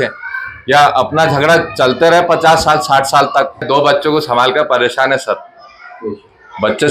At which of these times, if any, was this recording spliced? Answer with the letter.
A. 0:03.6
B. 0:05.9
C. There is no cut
A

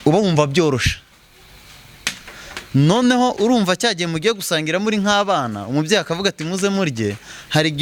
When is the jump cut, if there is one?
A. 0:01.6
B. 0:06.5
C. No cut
C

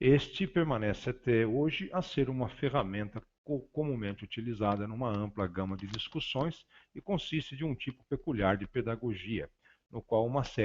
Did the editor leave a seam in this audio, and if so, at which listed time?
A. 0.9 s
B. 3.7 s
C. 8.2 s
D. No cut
B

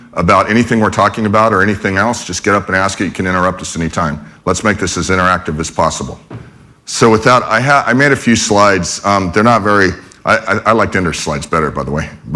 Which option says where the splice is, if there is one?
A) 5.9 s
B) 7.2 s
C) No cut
C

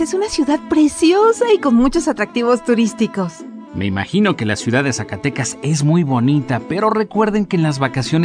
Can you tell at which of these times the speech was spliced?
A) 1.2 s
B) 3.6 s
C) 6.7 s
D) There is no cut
B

